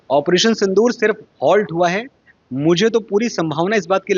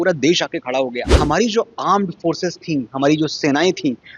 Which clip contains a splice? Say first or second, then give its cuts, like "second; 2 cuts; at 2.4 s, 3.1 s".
second; 1 cut; at 1.1 s